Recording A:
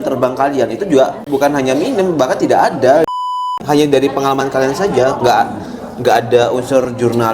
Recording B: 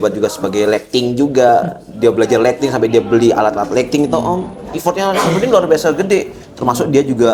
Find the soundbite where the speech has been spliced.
A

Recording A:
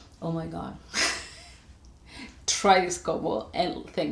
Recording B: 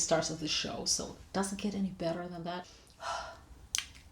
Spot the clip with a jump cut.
B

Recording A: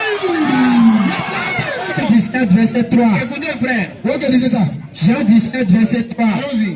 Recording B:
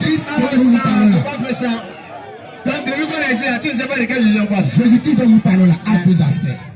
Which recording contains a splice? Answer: A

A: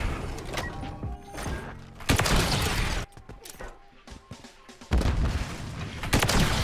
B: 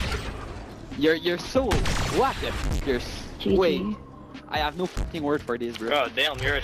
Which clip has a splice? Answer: A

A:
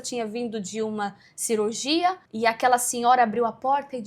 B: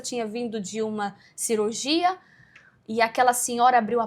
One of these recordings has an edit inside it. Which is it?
A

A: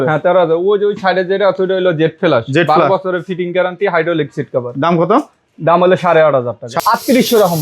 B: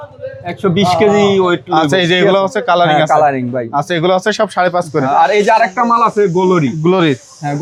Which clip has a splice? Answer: A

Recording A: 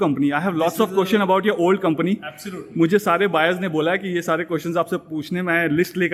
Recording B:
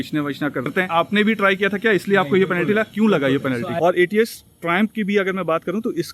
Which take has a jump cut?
B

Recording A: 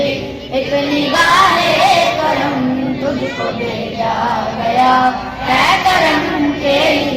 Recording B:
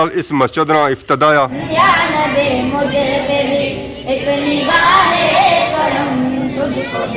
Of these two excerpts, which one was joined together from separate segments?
B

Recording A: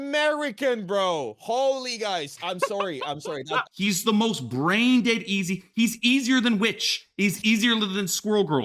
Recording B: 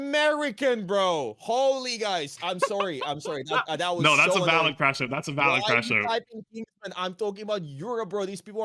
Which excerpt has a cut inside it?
A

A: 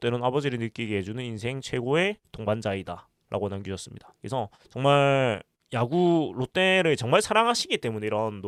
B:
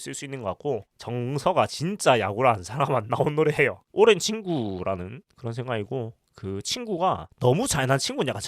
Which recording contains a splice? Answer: B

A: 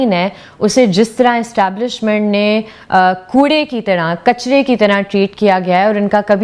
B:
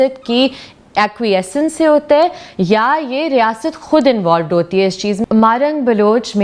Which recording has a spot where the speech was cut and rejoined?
B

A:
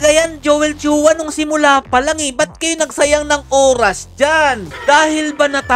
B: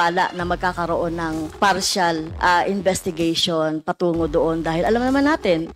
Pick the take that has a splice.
A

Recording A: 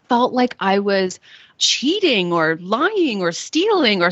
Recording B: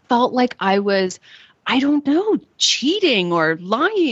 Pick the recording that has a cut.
A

